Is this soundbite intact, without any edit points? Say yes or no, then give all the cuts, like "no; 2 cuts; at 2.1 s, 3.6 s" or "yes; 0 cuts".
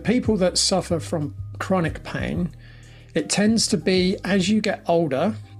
yes; 0 cuts